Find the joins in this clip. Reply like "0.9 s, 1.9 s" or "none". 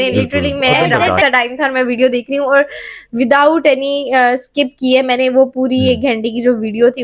none